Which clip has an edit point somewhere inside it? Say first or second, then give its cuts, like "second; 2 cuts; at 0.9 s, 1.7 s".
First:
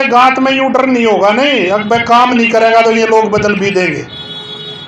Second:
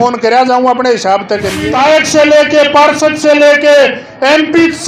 second; 1 cut; at 1.6 s